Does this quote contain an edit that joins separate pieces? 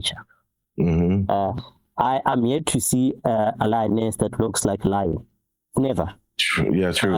no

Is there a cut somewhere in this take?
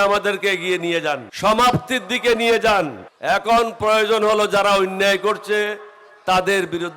yes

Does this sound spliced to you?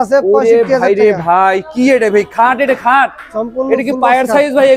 no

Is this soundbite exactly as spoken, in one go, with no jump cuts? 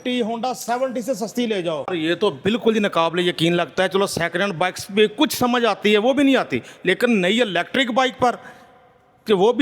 no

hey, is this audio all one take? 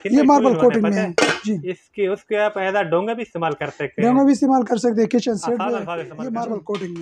no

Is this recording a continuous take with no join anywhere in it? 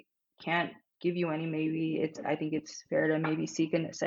yes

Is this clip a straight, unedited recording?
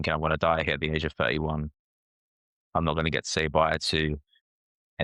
yes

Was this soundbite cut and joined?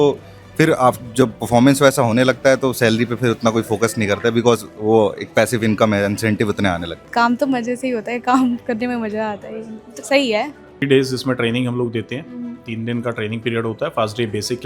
yes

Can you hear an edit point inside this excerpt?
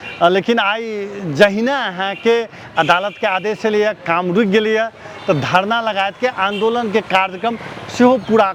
no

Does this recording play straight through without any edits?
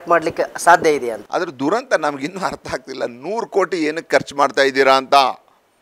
no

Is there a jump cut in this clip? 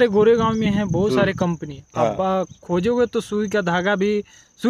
no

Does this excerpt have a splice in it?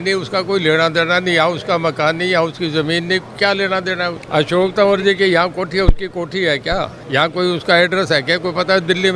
yes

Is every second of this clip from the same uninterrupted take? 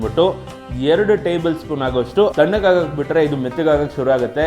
no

